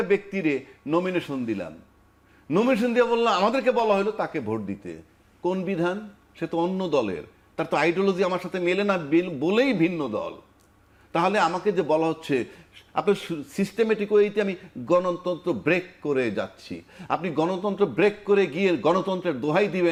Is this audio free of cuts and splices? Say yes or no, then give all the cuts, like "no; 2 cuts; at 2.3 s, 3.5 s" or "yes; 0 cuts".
yes; 0 cuts